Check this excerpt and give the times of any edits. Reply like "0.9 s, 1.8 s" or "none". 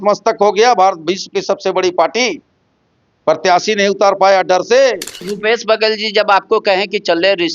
5.3 s